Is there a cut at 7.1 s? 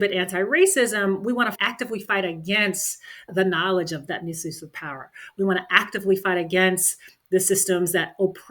no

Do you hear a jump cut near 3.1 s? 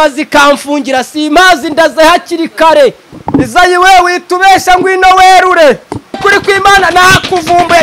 yes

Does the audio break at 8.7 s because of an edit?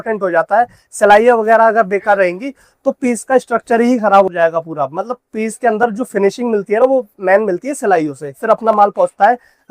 yes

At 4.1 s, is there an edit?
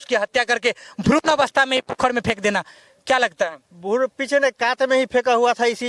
no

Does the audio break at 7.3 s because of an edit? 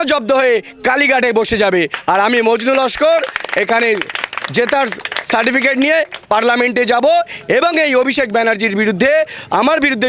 no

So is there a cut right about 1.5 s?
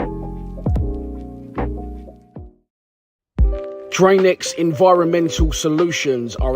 no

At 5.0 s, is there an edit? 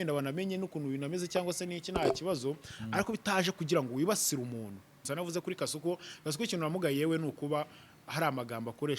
yes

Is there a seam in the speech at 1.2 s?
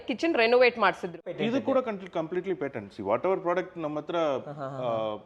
yes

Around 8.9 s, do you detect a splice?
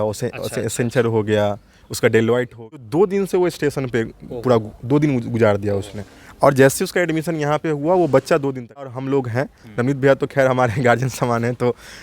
yes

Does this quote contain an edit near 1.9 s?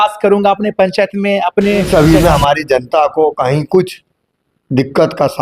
yes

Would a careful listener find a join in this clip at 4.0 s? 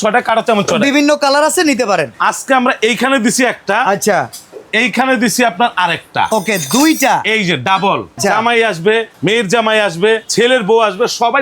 no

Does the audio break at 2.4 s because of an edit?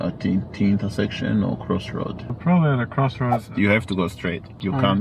yes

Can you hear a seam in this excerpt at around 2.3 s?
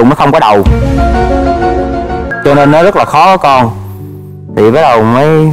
yes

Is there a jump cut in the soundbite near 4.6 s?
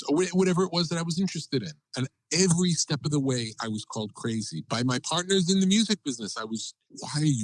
yes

